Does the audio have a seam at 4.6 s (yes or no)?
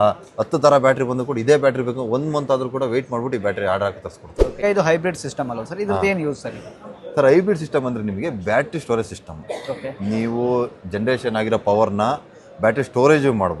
yes